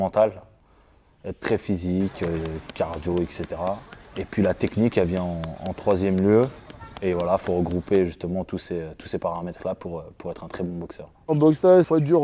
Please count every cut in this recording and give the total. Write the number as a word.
one